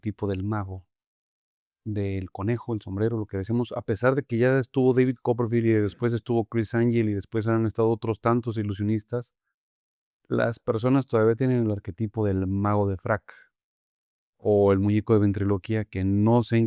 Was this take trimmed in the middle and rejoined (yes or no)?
no